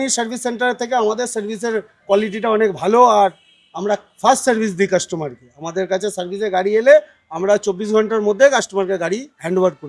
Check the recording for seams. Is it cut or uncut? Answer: uncut